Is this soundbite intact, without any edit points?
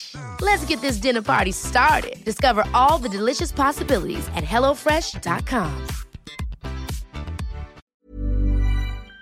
no; 1 cut; at 7.8 s

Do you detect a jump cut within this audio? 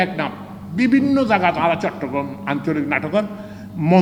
no; 0 cuts

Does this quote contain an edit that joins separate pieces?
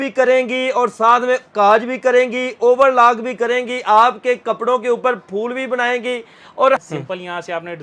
yes; 1 cut; at 6.8 s

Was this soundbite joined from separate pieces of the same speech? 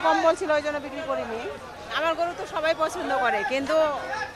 no; 0 cuts

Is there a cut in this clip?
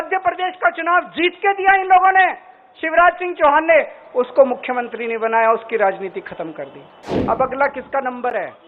yes; 1 cut; at 7.1 s

